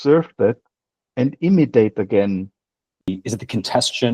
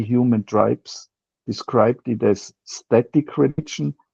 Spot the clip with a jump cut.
first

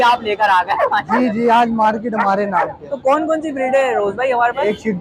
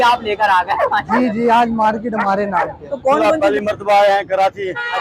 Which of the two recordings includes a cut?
second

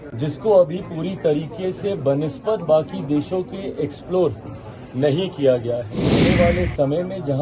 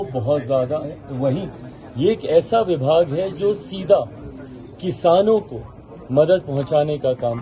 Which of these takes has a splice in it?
first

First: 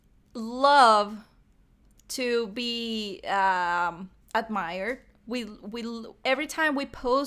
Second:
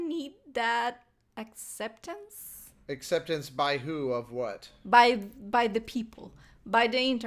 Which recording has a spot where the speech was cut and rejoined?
second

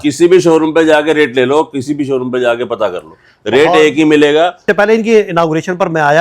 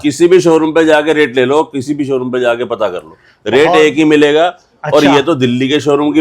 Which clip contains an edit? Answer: first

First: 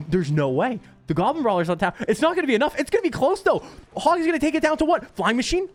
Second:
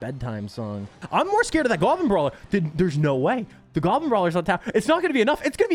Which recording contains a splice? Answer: second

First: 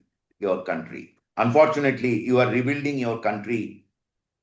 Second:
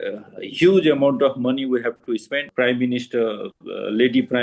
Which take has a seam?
second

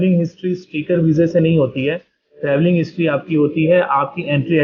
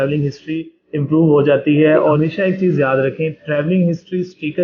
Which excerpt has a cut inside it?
second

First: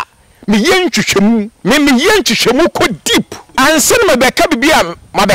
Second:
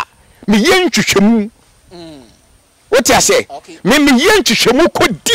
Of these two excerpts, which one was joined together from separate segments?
first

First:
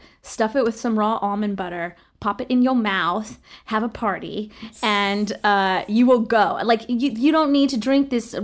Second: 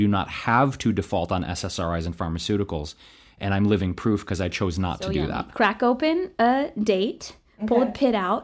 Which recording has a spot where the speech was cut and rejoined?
second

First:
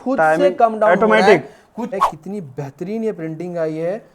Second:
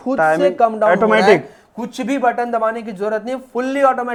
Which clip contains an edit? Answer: first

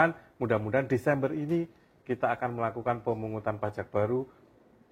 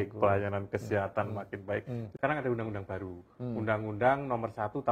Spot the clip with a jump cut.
second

